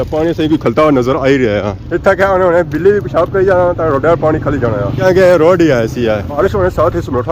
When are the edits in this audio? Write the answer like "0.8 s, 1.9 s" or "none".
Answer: 6.3 s

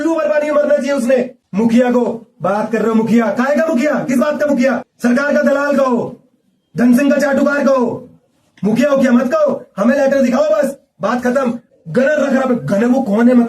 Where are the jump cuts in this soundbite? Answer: 1.4 s, 4.9 s, 11.6 s

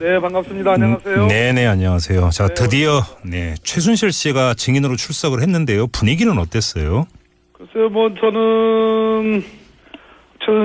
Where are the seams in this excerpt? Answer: none

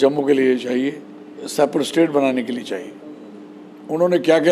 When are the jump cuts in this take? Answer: 1.5 s

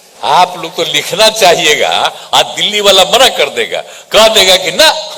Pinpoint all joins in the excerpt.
none

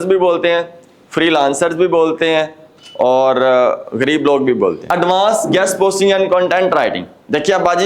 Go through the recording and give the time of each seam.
4.8 s

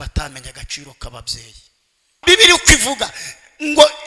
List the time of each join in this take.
2.2 s

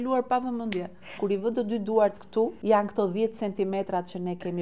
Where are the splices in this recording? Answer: 1.2 s, 2.6 s

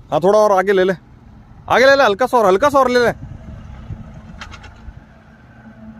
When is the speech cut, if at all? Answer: none

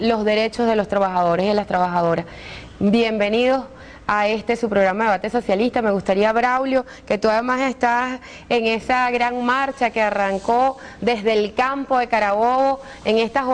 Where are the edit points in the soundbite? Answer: 7.6 s

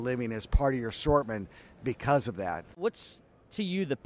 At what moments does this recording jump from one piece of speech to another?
2.8 s

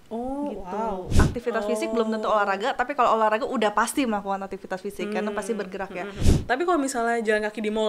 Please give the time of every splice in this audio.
1.1 s, 6.3 s

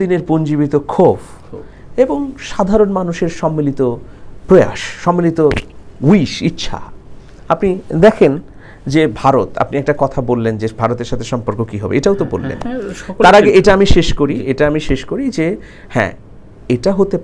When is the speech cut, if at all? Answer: none

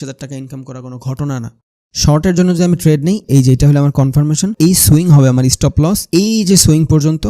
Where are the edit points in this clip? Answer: 1.6 s, 3.2 s, 4.5 s, 6.0 s

